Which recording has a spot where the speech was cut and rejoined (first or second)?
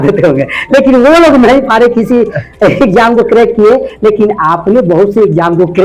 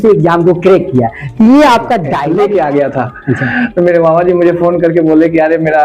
second